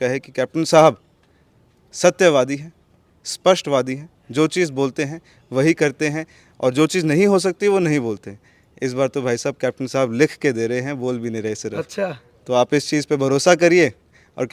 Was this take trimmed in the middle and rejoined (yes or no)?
no